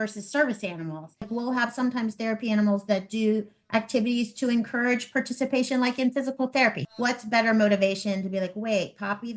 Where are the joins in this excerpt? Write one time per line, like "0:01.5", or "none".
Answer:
0:01.3
0:06.8